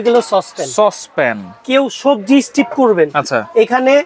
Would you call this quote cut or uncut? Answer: uncut